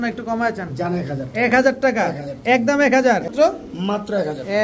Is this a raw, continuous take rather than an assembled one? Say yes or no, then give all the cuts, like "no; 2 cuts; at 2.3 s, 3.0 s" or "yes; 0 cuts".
no; 1 cut; at 3.3 s